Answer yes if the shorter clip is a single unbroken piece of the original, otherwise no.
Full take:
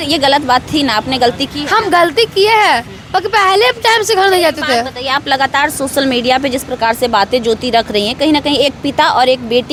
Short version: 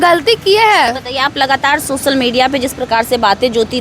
no